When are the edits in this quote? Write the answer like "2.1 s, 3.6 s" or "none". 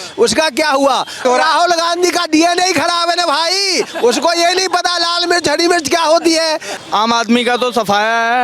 1.2 s, 6.7 s